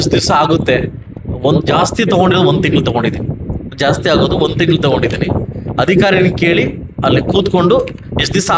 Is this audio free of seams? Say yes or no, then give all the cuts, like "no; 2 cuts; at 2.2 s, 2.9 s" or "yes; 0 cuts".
yes; 0 cuts